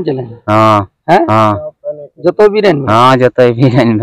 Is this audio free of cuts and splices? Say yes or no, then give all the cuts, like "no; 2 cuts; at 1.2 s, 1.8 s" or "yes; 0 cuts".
yes; 0 cuts